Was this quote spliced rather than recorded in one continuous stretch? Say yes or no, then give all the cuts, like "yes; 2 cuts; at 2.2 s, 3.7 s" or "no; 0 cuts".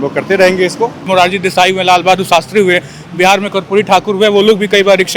yes; 1 cut; at 1.1 s